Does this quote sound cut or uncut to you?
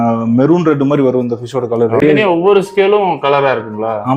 cut